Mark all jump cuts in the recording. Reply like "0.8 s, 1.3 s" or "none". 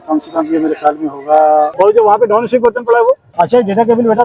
1.7 s, 3.3 s